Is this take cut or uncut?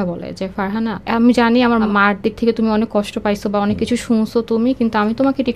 cut